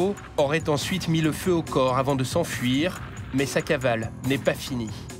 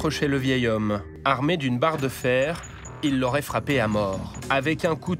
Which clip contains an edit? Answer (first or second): second